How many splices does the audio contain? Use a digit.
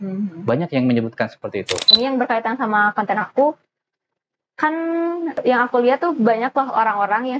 2